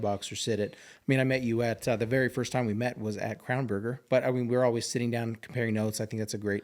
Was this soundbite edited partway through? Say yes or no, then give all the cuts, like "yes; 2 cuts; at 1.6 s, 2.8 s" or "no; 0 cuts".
yes; 1 cut; at 4.0 s